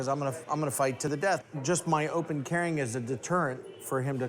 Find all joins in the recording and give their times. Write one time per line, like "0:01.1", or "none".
0:01.2